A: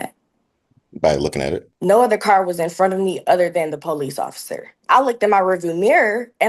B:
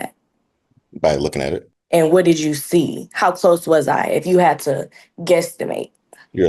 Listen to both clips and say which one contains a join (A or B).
A